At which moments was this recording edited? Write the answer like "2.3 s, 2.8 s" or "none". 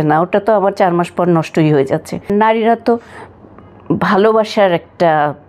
2.3 s